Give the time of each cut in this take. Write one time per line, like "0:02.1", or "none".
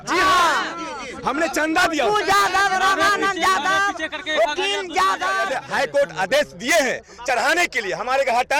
0:05.5